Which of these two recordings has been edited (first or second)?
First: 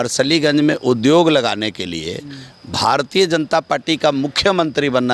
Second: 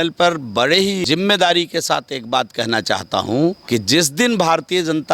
second